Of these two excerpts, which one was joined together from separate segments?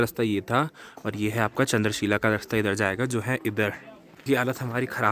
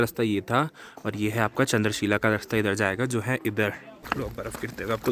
second; 1 cut; at 3.9 s

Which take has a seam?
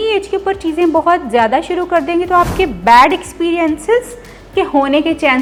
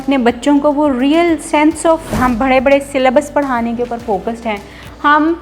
second; 1 cut; at 2.1 s

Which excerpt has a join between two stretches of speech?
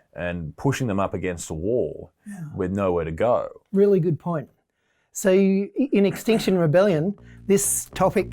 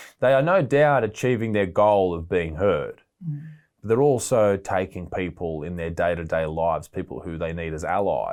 first; 1 cut; at 3.6 s

